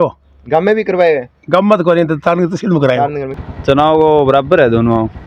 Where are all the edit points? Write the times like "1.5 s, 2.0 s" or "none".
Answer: 3.2 s